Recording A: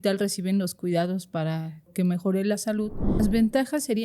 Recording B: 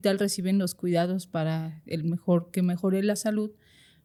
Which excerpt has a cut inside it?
A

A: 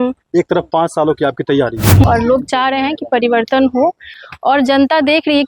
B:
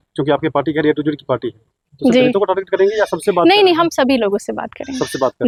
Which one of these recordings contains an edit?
A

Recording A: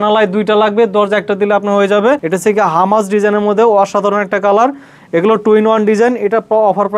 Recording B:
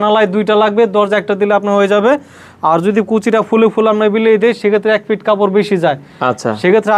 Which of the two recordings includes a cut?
A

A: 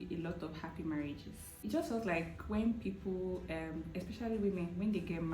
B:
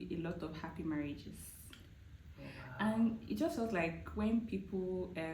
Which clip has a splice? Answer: A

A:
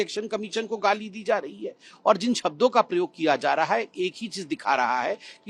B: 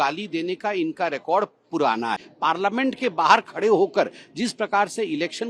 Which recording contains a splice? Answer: B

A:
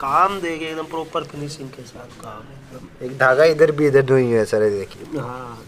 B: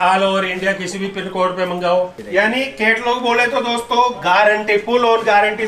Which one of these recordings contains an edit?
B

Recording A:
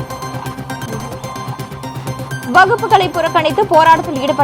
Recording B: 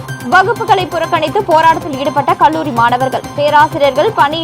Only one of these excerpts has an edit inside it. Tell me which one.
A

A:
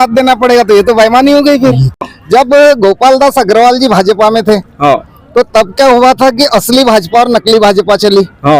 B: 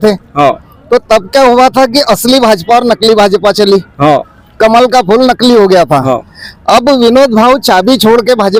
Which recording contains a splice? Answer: A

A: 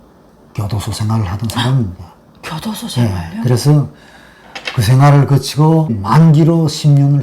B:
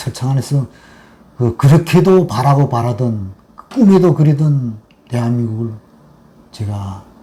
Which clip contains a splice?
A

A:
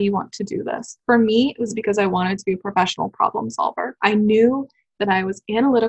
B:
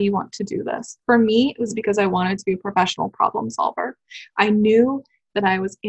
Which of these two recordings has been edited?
A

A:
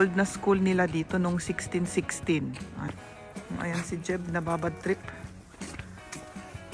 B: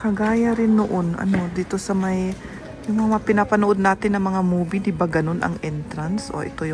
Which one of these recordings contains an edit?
A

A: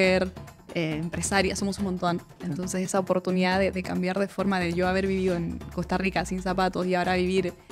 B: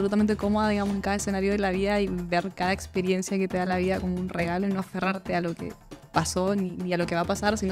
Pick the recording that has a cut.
A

